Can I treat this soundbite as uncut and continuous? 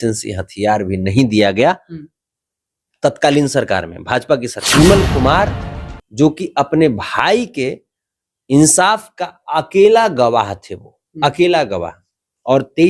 no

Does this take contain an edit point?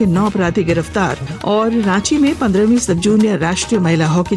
yes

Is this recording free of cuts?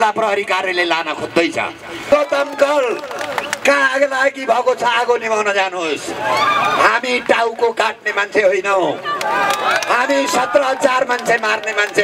no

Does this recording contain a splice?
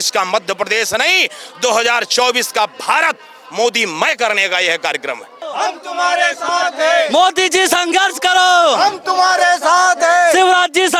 no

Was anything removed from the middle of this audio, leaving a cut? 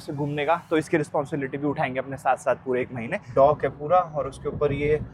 yes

